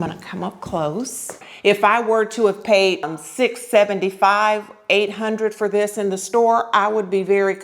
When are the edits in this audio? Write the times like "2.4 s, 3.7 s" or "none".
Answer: 1.5 s